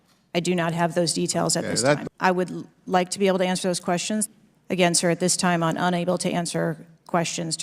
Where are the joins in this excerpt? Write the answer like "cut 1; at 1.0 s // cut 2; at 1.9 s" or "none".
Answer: cut 1; at 2.0 s // cut 2; at 4.3 s

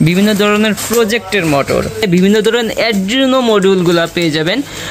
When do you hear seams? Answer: cut 1; at 2.0 s

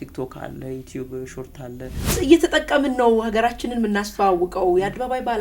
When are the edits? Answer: cut 1; at 2.1 s

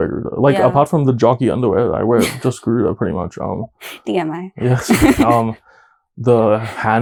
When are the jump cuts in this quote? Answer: none

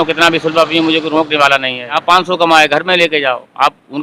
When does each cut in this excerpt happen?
cut 1; at 2.0 s

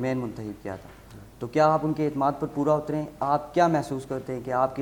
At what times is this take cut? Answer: none

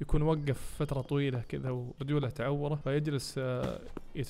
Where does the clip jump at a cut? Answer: cut 1; at 1.9 s // cut 2; at 2.8 s

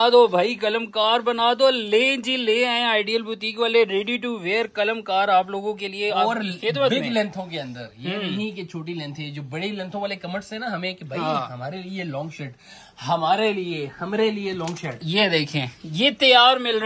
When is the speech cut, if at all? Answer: none

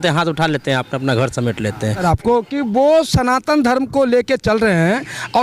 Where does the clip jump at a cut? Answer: cut 1; at 2.0 s

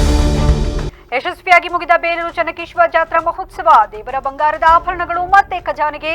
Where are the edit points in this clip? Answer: cut 1; at 0.9 s

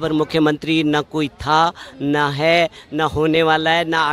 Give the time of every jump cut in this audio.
none

